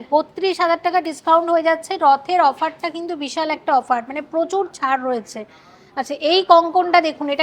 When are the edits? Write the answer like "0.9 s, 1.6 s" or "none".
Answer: none